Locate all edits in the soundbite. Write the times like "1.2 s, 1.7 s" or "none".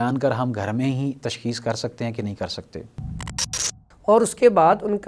3.4 s